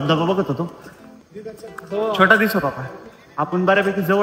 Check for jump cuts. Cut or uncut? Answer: uncut